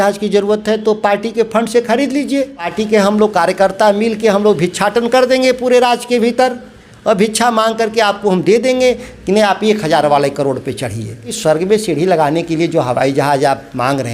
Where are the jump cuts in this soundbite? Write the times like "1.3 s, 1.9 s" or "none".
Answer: 2.7 s, 11.3 s